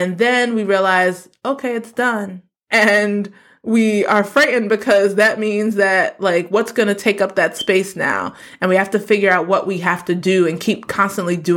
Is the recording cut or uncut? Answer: uncut